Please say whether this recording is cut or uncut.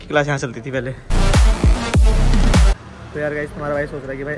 uncut